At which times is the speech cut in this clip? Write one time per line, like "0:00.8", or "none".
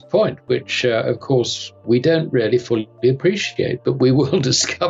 none